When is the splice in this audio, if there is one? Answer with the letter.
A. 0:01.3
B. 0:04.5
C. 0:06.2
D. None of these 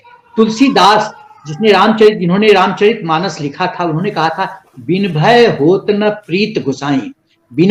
D